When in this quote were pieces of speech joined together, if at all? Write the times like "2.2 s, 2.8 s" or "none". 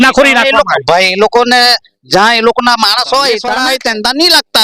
3.5 s